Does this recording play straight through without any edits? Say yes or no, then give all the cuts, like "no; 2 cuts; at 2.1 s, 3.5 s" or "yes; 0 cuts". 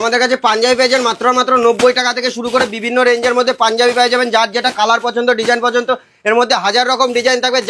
yes; 0 cuts